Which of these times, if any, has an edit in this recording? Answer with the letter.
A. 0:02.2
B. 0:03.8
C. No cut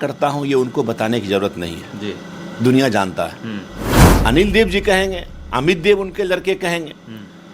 B